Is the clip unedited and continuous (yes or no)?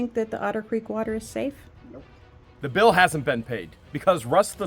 no